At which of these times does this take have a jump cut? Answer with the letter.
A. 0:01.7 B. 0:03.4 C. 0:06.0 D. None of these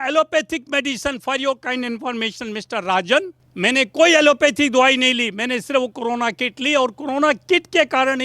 B